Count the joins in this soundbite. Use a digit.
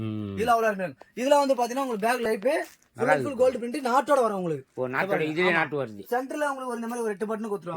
1